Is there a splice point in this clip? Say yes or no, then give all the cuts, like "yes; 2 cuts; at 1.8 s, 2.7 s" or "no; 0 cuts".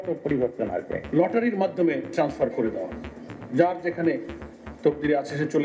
yes; 1 cut; at 1.0 s